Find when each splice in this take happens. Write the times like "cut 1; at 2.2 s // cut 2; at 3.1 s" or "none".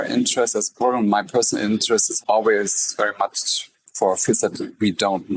cut 1; at 2.1 s